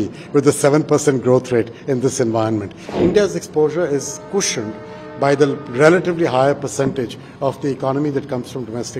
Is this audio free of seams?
no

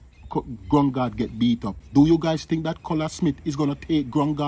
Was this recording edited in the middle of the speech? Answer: yes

